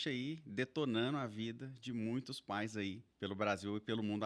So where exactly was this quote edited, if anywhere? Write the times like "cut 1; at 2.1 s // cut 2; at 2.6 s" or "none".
cut 1; at 3.1 s